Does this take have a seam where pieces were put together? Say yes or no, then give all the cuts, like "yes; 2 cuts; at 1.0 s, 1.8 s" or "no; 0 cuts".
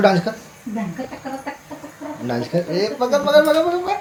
no; 0 cuts